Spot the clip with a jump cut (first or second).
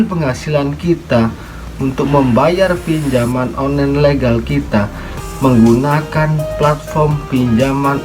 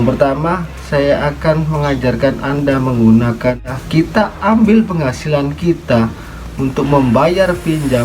second